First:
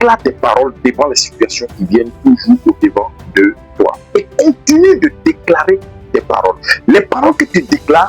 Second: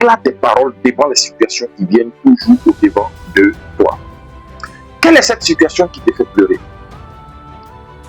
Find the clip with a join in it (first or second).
first